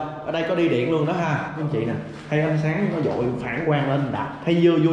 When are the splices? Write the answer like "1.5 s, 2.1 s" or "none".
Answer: 1.7 s